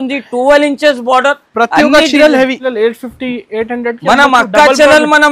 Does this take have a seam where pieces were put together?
yes; 1 cut; at 2.6 s

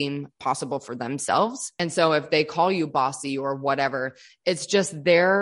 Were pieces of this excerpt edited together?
yes; 1 cut; at 1.7 s

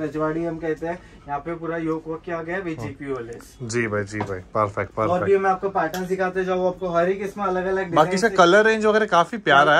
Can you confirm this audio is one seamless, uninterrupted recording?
yes; 0 cuts

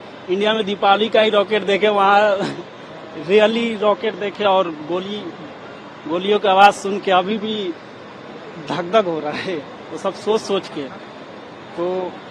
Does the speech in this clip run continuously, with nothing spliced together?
yes; 0 cuts

